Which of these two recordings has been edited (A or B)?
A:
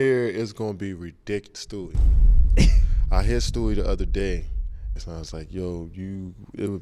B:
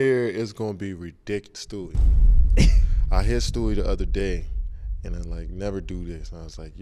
A